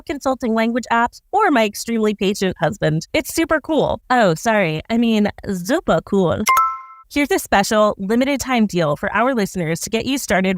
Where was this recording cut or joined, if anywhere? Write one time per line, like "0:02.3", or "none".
0:07.0